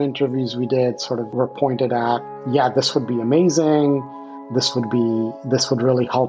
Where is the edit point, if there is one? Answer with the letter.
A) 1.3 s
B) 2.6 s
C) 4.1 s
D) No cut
A